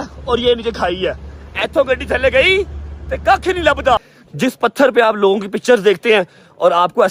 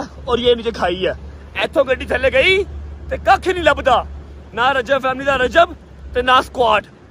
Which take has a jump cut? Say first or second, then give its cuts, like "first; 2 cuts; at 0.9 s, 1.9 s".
first; 1 cut; at 4.2 s